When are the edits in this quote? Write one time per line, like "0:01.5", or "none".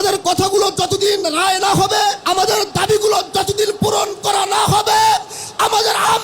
0:02.2